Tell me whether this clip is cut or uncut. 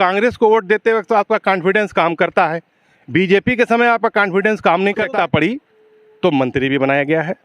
cut